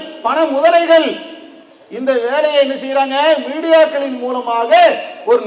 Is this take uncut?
yes; 0 cuts

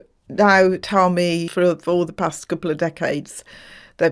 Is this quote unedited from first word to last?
no; 1 cut; at 1.5 s

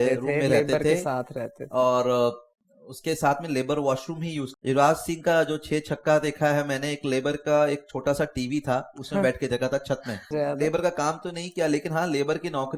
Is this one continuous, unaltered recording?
no; 2 cuts; at 4.5 s, 10.3 s

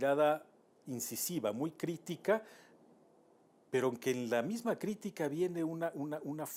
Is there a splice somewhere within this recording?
no; 0 cuts

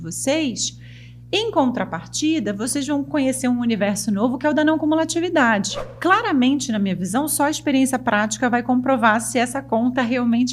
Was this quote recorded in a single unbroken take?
no; 1 cut; at 5.8 s

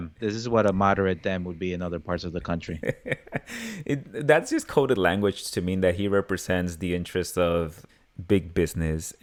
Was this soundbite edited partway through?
no; 0 cuts

